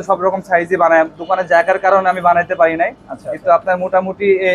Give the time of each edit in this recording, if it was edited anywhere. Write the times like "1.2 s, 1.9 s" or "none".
none